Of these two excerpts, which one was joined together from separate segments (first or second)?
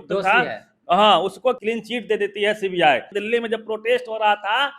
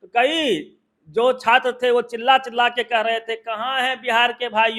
first